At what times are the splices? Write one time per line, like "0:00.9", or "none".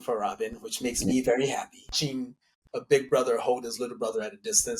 0:02.0